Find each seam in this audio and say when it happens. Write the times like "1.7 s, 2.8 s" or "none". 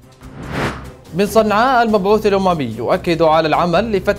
none